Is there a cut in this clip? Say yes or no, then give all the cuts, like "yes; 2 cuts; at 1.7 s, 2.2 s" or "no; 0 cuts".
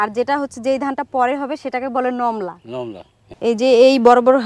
yes; 1 cut; at 3.2 s